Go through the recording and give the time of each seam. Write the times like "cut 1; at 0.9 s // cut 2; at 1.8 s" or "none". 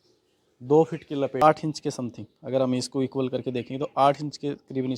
cut 1; at 1.4 s